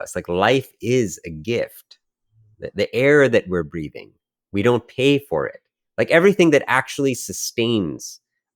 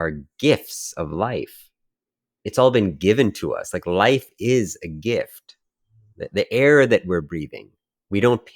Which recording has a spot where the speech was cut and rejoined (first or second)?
second